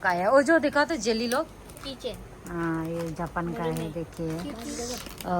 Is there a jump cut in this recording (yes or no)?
yes